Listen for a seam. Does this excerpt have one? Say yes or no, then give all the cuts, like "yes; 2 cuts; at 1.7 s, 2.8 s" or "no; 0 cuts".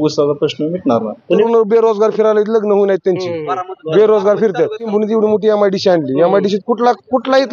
yes; 2 cuts; at 1.4 s, 4.8 s